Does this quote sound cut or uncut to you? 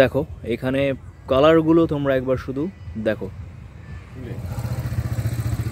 cut